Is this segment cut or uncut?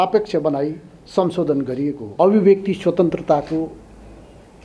cut